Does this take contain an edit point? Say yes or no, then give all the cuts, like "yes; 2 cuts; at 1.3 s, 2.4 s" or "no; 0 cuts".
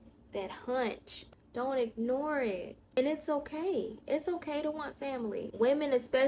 yes; 3 cuts; at 1.2 s, 2.8 s, 5.5 s